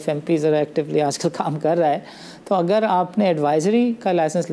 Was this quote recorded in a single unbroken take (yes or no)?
yes